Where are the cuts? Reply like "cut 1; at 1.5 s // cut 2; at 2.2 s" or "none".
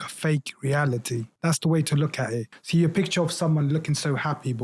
cut 1; at 1.3 s // cut 2; at 2.5 s